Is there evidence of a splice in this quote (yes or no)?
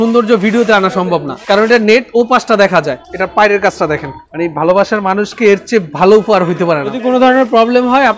yes